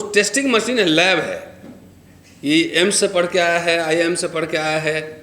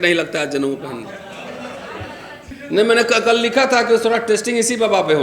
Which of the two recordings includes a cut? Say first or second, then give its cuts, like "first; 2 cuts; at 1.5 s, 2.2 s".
second; 1 cut; at 2.5 s